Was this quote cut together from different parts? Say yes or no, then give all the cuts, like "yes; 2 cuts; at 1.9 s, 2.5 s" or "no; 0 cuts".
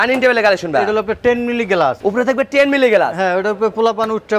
no; 0 cuts